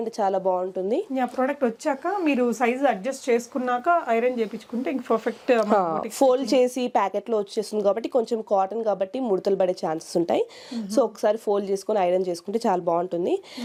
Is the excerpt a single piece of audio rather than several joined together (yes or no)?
yes